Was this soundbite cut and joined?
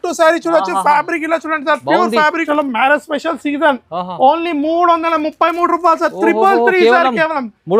yes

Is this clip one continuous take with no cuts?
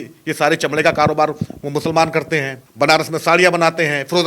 no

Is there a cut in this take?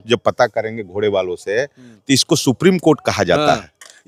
no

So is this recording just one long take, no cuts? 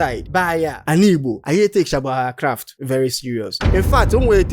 no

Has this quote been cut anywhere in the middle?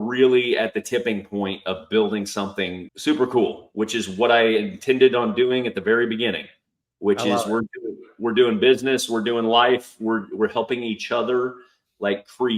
yes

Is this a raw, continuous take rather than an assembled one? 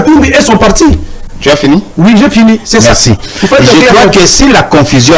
yes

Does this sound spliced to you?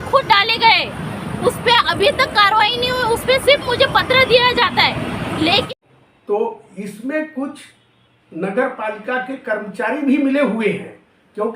yes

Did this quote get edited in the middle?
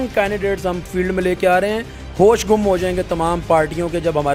no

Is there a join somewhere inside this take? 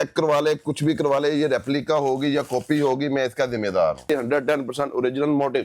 yes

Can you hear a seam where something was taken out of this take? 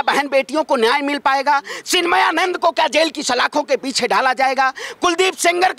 no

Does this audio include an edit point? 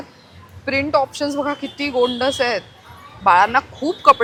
no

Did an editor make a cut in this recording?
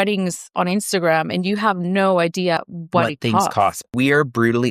yes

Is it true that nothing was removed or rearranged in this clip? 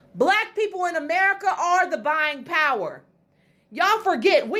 yes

